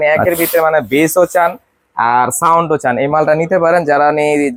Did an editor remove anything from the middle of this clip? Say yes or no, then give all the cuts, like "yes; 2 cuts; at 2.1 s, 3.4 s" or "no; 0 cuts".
no; 0 cuts